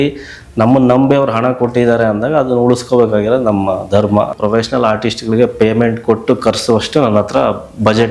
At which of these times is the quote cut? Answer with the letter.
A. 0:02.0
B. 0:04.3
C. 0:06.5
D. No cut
B